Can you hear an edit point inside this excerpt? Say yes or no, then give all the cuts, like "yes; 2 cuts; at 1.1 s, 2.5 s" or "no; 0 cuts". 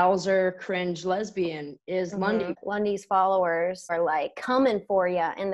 yes; 2 cuts; at 2.6 s, 3.9 s